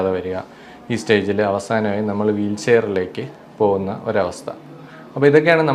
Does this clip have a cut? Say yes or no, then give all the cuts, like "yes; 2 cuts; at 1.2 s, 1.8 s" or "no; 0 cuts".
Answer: no; 0 cuts